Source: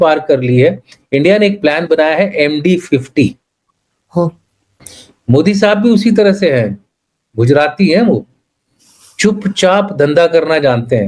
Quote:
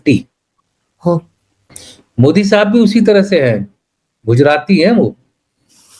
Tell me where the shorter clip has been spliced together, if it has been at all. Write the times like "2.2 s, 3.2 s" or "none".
none